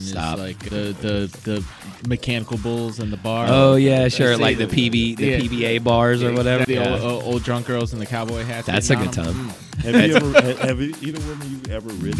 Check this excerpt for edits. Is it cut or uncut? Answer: cut